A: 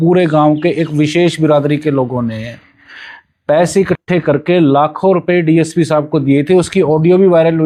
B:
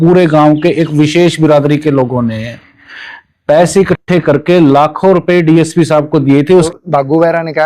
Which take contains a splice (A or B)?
B